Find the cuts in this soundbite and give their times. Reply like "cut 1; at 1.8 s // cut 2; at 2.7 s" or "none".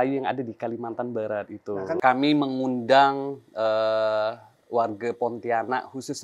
cut 1; at 2.0 s